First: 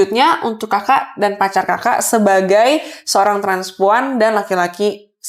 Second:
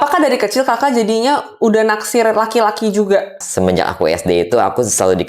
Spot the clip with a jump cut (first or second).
second